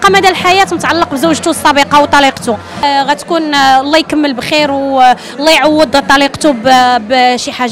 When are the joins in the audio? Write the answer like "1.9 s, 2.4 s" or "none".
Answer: 2.8 s